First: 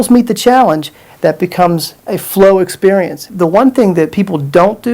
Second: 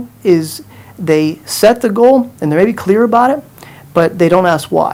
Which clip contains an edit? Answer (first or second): first